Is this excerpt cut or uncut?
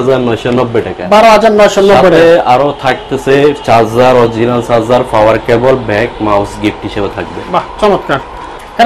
uncut